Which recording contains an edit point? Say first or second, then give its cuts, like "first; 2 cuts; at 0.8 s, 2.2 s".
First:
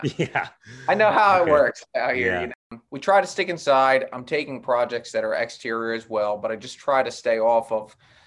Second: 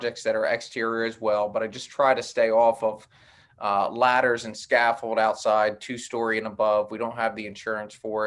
first; 1 cut; at 2.8 s